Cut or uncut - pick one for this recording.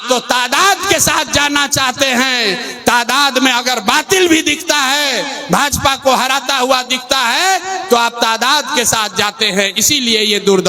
uncut